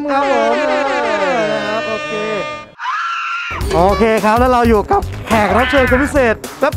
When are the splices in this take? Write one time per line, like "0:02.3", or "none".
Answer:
0:02.7

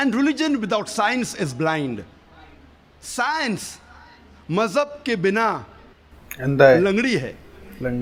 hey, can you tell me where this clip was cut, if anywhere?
none

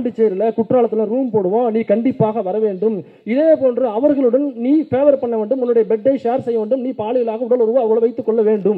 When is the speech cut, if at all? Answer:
none

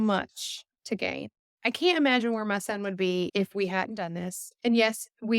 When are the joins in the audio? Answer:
0:01.4

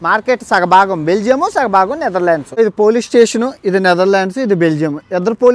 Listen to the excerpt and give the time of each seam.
0:02.6

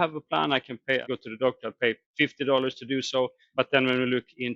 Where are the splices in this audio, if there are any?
0:01.0
0:03.4

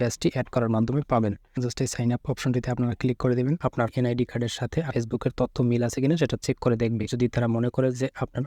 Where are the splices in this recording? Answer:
0:01.7
0:03.9
0:04.9
0:07.1

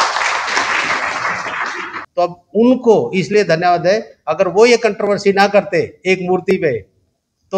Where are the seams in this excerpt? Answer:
0:01.9

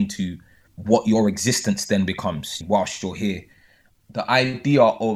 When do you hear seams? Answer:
0:02.6

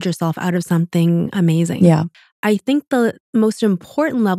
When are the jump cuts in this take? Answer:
0:02.1

